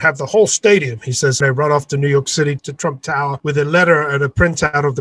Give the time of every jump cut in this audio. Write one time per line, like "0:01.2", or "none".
0:01.4
0:02.6